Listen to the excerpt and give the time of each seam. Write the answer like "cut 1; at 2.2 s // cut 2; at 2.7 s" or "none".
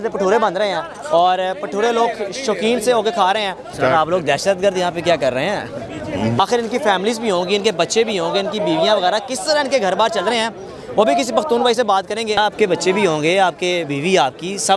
cut 1; at 3.7 s // cut 2; at 6.4 s // cut 3; at 12.4 s